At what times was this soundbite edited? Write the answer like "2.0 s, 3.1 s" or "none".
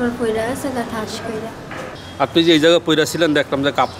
1.8 s